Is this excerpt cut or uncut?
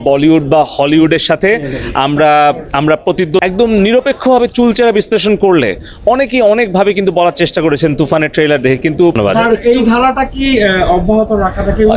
cut